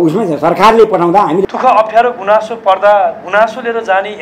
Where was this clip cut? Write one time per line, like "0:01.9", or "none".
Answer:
0:01.4